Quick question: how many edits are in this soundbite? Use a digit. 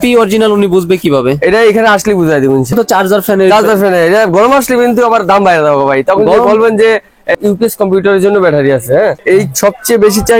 3